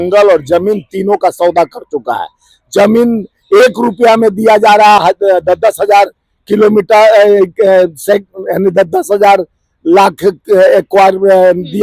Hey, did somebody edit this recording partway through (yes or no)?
no